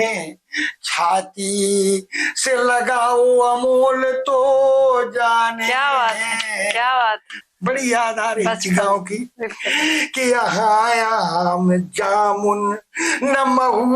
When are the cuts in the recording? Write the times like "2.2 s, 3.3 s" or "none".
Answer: 7.3 s